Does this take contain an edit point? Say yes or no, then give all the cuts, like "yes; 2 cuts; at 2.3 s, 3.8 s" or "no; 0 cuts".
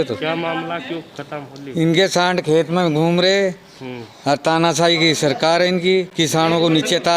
no; 0 cuts